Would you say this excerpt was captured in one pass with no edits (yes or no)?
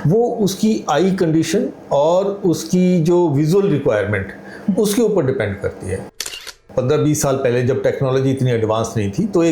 no